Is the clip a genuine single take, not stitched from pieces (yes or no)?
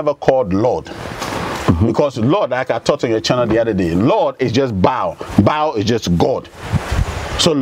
yes